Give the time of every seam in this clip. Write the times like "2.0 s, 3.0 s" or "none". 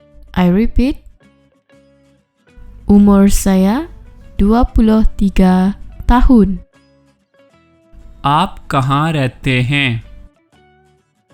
6.6 s, 8.2 s